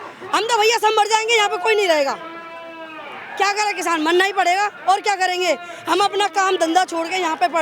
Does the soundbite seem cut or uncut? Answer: uncut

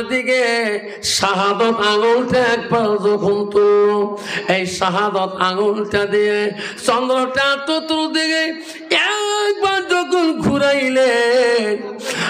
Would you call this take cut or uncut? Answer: uncut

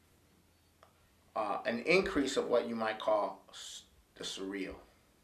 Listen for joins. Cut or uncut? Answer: cut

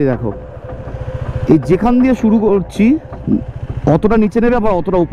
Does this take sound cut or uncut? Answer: uncut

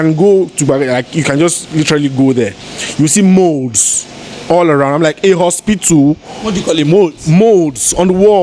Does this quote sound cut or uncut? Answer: uncut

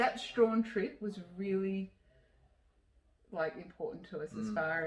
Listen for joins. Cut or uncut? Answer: uncut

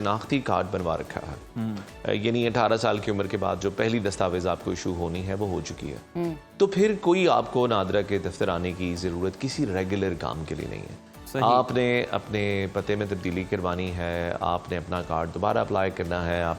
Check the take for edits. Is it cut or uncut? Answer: uncut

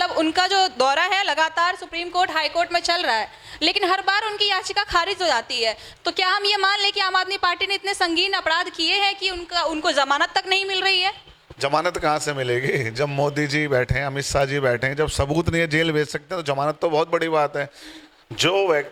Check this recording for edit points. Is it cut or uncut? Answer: uncut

